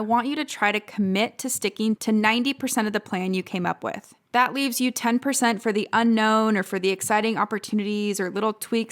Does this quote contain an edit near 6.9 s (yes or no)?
no